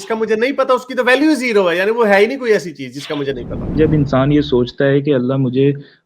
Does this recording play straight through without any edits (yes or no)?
no